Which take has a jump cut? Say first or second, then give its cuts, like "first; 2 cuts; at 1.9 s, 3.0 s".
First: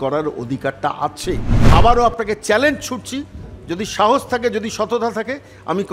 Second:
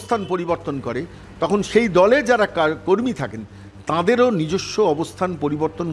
first; 1 cut; at 1.5 s